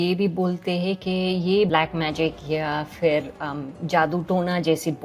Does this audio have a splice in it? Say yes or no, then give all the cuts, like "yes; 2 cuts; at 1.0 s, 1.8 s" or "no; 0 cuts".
yes; 1 cut; at 1.7 s